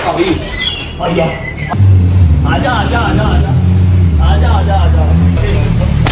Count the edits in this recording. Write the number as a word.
two